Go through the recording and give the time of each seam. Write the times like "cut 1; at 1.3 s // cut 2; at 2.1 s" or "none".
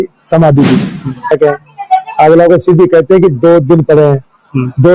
cut 1; at 1.3 s